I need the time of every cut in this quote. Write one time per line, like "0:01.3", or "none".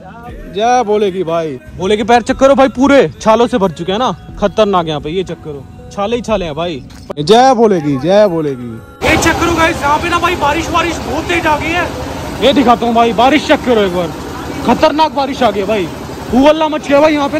0:01.6
0:07.2
0:09.0